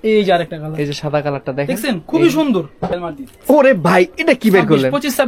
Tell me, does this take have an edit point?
yes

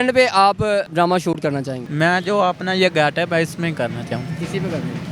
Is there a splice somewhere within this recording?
yes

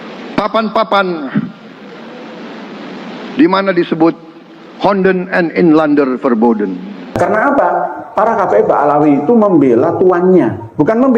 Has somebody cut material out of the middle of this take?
yes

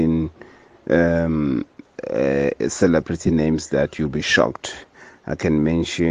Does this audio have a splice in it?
no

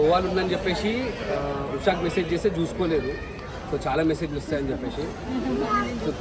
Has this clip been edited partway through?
no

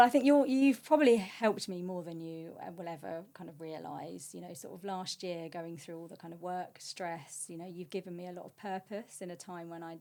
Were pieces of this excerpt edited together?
no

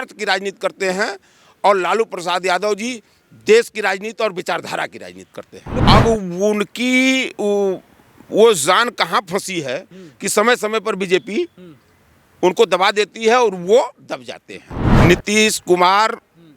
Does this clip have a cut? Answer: yes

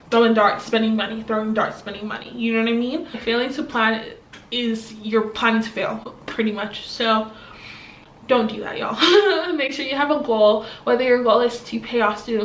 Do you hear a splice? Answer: no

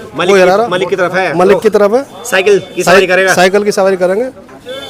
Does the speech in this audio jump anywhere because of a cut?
no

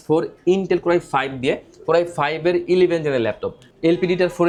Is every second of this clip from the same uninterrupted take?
yes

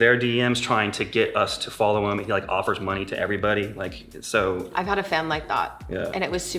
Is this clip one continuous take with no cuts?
yes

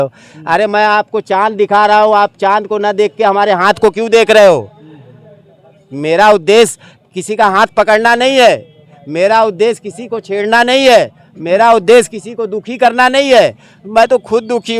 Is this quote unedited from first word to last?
yes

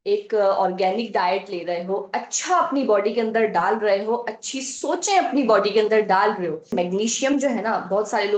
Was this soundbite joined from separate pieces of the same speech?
yes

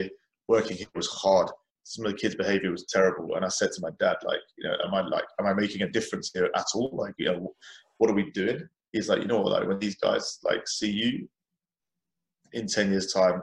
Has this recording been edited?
yes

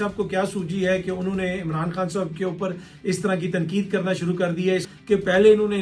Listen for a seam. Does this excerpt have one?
yes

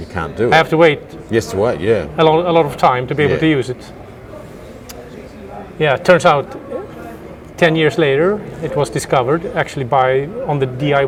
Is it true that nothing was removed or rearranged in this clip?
yes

